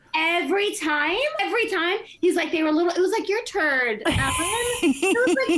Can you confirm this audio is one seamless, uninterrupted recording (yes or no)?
no